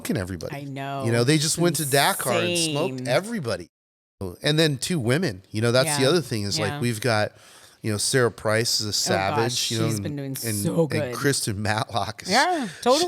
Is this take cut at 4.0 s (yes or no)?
yes